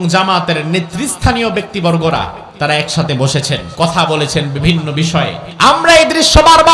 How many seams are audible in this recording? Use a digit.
3